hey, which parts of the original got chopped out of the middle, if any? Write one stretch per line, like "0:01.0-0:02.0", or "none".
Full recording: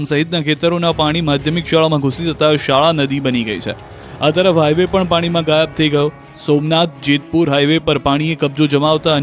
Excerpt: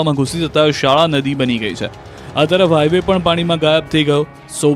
none